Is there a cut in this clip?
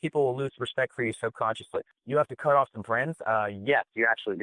yes; 1 cut; at 2.0 s

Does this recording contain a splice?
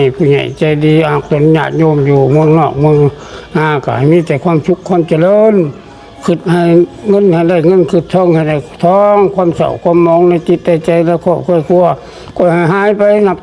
no; 0 cuts

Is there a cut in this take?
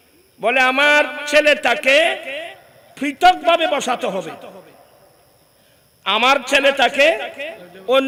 no; 0 cuts

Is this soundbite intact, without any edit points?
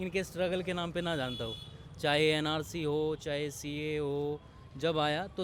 yes; 0 cuts

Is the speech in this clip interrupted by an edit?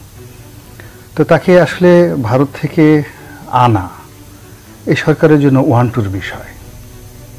no; 0 cuts

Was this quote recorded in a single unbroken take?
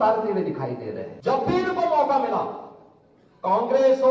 no; 1 cut; at 1.1 s

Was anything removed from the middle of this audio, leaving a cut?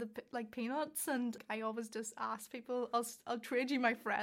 yes; 1 cut; at 1.4 s

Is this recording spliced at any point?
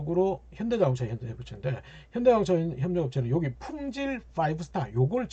no; 0 cuts

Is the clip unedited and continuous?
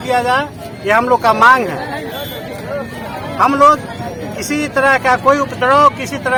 yes; 0 cuts

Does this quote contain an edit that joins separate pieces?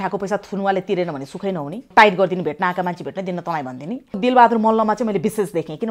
yes; 2 cuts; at 1.9 s, 4.2 s

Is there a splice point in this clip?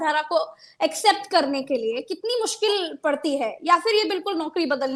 no; 0 cuts

